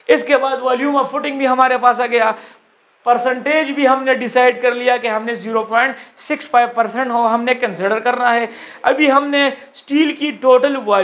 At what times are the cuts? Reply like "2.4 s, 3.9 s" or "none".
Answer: none